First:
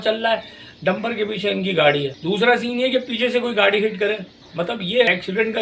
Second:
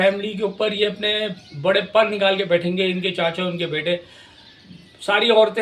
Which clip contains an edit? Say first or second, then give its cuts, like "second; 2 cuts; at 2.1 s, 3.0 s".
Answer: first; 2 cuts; at 2.1 s, 4.7 s